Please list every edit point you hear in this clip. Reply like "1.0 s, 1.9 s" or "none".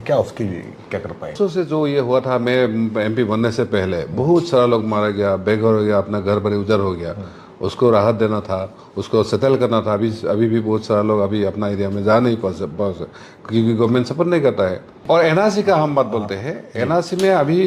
1.3 s, 14.9 s